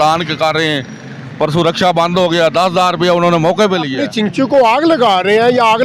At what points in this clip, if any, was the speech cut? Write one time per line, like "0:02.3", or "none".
0:04.0